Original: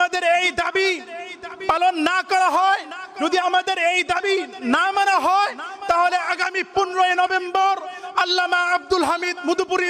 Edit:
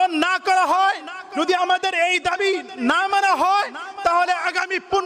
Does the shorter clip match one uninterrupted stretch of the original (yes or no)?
yes